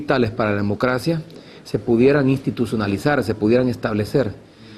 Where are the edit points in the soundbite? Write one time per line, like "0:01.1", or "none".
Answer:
none